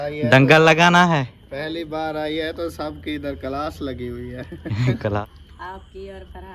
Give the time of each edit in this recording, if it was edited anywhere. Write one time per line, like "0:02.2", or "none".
0:05.2